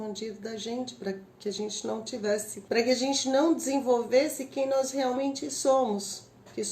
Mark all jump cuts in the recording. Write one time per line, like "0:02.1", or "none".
0:02.5